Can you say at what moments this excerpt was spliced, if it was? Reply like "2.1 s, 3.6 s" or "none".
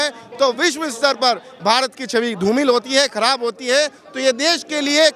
none